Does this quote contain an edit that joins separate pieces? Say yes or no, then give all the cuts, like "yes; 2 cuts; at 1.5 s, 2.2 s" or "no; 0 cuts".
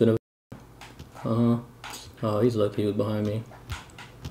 no; 0 cuts